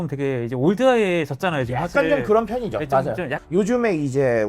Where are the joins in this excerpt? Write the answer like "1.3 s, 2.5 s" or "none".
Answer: 3.4 s